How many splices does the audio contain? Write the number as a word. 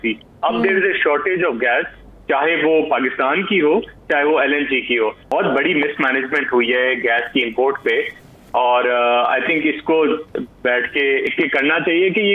two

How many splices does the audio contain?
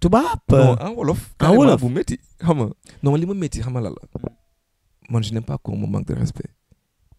one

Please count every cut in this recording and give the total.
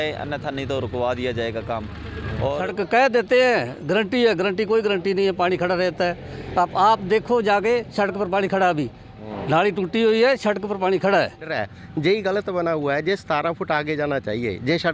two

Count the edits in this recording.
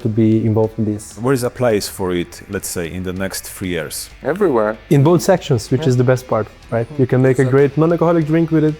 three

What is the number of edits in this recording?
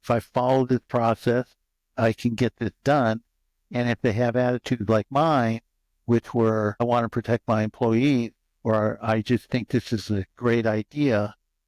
one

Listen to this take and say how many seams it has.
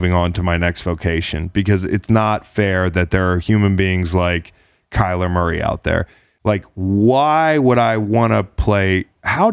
one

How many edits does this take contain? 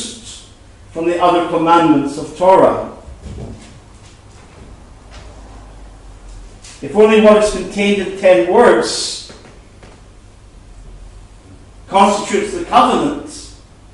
one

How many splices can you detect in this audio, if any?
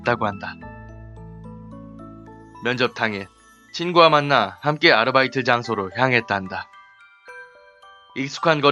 one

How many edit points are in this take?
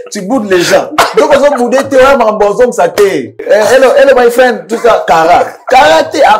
one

